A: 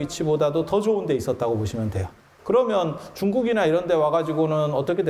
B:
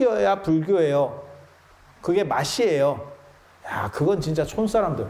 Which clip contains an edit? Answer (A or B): A